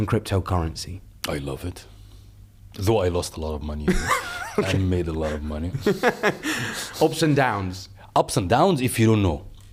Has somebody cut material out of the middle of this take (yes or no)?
no